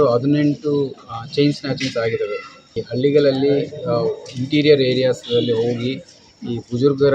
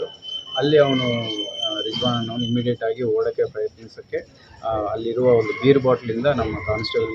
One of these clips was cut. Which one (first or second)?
first